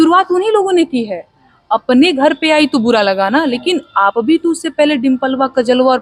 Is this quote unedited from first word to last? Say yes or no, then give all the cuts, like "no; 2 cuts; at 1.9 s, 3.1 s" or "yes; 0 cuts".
yes; 0 cuts